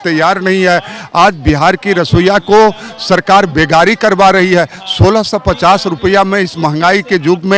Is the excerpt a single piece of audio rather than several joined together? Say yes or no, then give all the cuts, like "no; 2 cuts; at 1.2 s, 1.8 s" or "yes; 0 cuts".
yes; 0 cuts